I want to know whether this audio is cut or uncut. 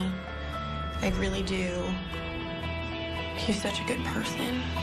uncut